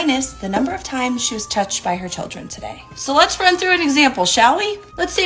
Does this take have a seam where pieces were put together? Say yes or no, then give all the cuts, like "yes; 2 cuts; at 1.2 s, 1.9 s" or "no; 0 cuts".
yes; 1 cut; at 2.9 s